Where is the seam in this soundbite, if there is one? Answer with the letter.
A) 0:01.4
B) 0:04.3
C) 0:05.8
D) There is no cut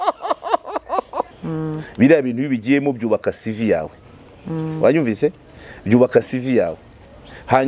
A